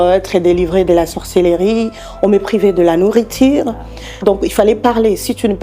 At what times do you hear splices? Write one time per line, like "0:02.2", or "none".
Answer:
0:04.2